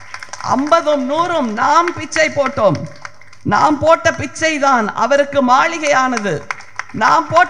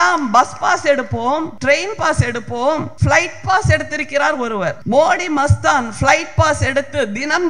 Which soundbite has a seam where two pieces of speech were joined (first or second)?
second